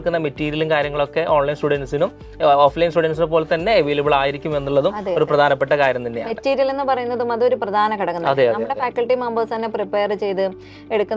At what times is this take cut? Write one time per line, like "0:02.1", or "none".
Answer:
none

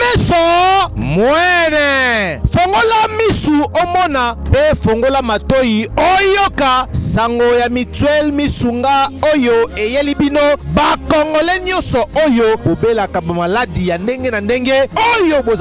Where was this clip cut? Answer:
none

